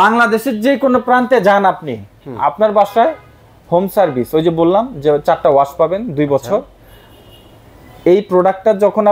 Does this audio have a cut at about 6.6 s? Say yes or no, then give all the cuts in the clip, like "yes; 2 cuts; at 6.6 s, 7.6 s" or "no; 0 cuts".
no; 0 cuts